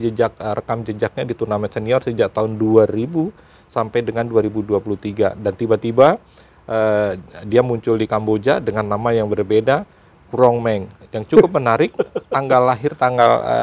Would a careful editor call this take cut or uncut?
uncut